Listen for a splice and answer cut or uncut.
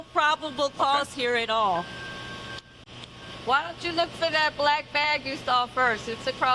cut